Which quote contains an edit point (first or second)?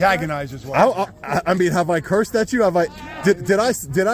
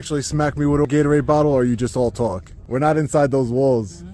second